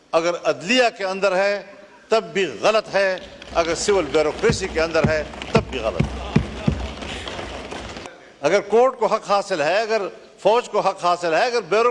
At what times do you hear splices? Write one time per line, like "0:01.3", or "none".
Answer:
0:08.0